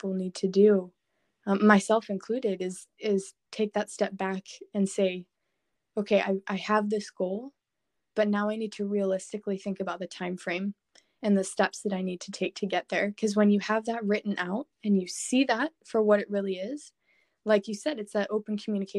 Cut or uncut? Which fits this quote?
uncut